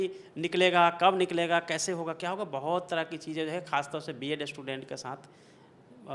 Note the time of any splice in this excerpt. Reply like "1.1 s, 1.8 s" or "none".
none